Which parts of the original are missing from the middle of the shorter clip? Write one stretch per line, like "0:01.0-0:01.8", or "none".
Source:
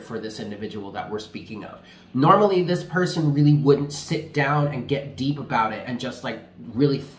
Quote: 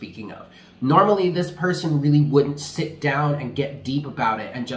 none